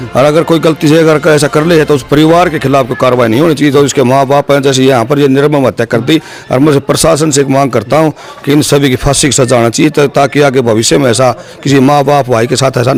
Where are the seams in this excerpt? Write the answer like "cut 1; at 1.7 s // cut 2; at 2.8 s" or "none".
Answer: none